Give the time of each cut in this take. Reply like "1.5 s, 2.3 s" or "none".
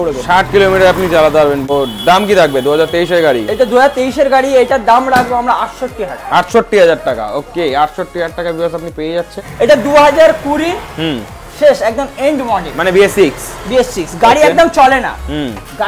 1.7 s, 9.4 s